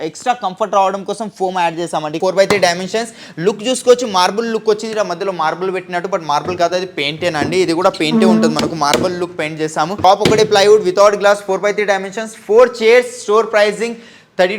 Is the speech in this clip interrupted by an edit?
yes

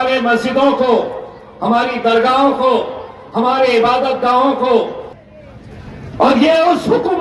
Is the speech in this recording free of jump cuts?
no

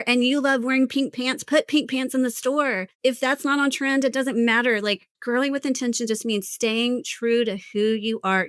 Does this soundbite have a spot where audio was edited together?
yes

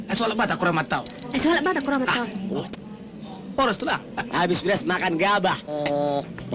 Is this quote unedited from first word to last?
yes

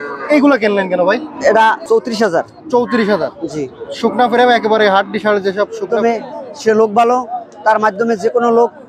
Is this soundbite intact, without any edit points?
no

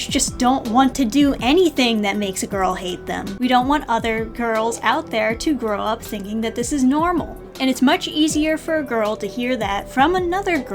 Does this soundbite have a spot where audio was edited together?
yes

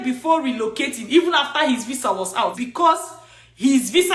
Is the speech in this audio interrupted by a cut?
yes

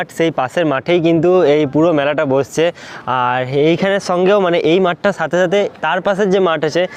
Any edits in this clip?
no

